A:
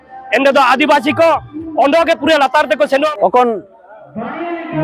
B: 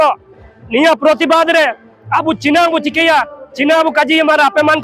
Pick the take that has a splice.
A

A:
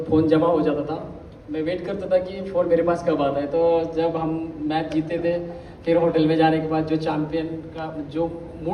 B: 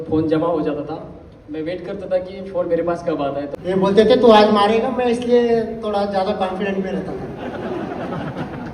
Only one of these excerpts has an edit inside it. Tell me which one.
B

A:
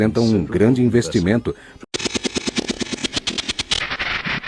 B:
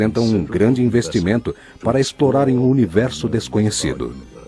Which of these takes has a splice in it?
B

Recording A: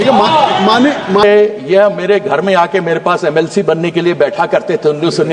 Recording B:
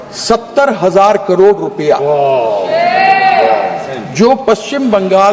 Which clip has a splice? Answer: A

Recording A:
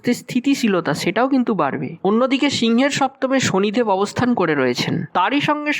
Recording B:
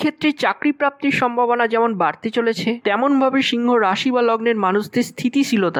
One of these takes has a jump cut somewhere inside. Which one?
A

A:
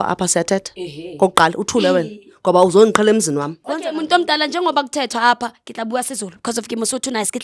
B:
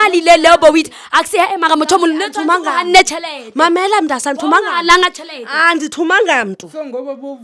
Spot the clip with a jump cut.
A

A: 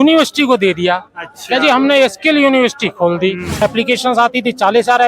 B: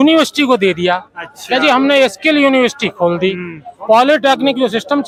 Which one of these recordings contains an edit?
A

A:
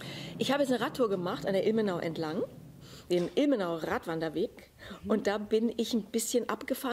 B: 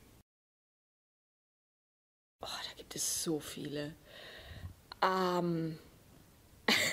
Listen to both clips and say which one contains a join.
A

